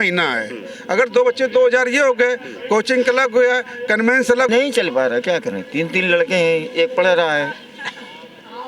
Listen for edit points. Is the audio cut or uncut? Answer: cut